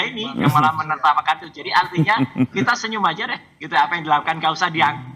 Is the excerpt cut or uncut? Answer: uncut